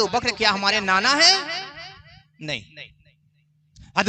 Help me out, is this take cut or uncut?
uncut